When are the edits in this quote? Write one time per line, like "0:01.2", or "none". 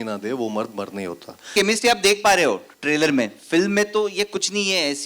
0:01.5

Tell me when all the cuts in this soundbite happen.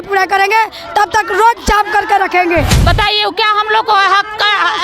0:02.8

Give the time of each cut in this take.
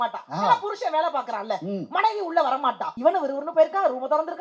0:02.9

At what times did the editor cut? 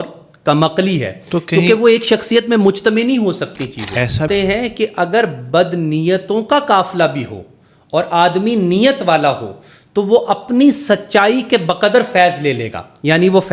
0:04.3

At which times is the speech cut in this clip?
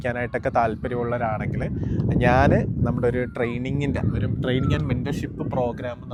none

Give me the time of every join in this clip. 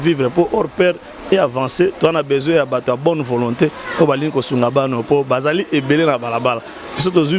none

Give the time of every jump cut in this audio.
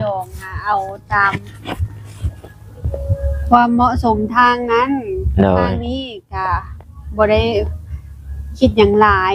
none

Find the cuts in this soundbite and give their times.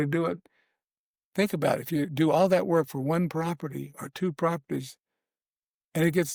none

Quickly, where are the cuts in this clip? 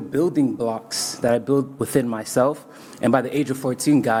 none

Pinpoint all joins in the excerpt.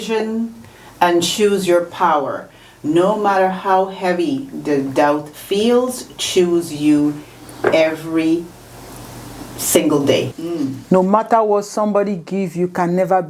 0:10.3

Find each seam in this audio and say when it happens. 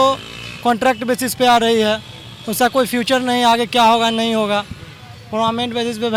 none

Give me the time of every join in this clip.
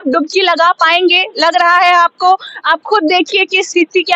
none

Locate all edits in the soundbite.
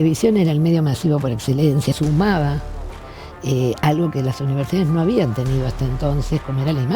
0:02.0

